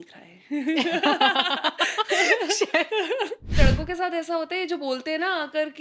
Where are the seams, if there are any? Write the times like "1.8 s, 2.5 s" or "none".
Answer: 3.6 s